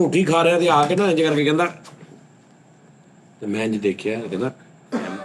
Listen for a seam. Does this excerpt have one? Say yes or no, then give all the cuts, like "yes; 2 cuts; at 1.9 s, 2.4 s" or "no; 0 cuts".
no; 0 cuts